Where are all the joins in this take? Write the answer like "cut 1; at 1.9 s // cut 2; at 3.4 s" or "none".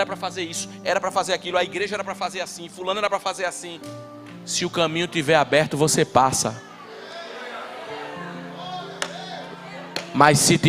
none